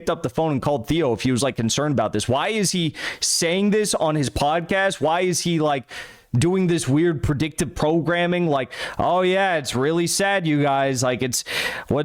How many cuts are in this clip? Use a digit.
0